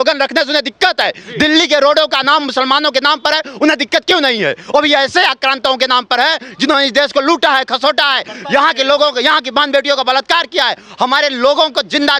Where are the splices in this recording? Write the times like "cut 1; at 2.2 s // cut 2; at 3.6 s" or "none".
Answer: none